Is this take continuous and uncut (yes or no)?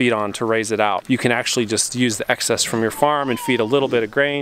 no